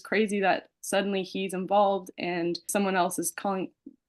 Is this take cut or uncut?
cut